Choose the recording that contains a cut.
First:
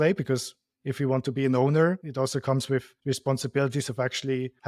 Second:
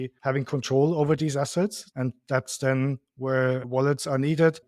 second; 1 cut; at 1.9 s

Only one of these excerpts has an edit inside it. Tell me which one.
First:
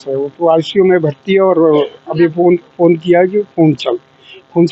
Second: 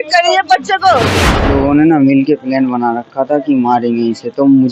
second; 1 cut; at 1.5 s

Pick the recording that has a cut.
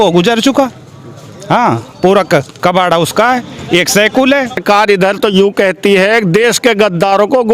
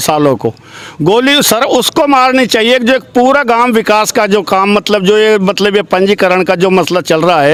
first; 1 cut; at 4.6 s

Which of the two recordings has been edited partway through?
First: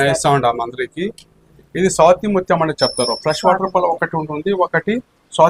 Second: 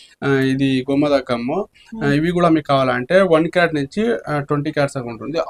first; 1 cut; at 1.5 s

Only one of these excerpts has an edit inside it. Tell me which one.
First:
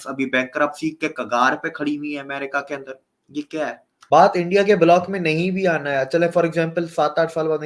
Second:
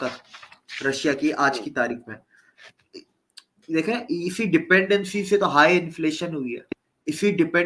first; 1 cut; at 3.9 s

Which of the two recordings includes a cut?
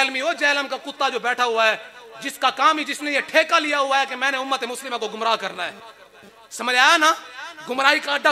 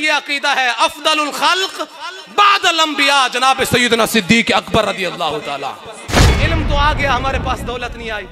second; 1 cut; at 6.2 s

